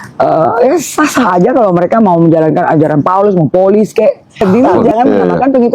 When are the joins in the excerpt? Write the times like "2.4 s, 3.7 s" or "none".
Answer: 4.4 s